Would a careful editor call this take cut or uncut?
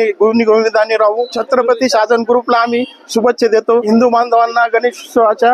uncut